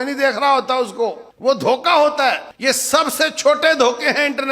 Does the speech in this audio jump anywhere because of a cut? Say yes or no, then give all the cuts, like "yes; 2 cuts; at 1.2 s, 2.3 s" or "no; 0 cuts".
yes; 2 cuts; at 1.3 s, 2.5 s